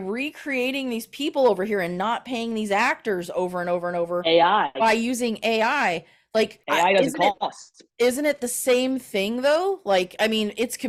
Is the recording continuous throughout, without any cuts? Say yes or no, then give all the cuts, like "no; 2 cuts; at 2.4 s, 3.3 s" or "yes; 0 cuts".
yes; 0 cuts